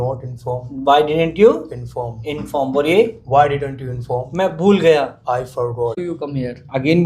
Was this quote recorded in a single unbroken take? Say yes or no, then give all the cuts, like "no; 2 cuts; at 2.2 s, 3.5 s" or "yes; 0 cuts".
no; 1 cut; at 6.0 s